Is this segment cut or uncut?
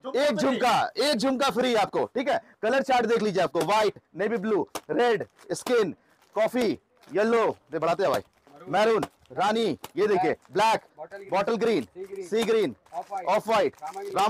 uncut